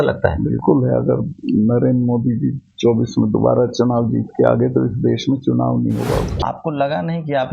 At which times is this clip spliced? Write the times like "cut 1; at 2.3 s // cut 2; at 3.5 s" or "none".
cut 1; at 6.3 s